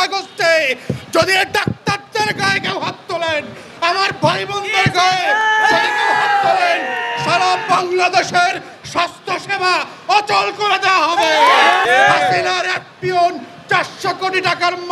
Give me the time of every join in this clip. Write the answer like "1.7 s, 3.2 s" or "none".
11.8 s